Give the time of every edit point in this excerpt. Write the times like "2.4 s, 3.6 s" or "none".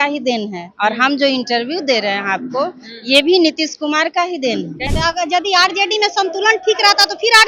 4.8 s